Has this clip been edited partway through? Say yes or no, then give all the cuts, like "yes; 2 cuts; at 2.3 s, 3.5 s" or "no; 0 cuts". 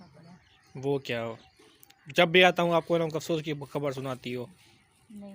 no; 0 cuts